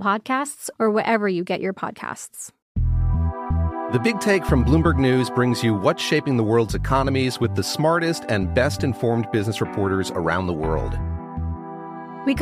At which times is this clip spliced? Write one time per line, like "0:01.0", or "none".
0:02.5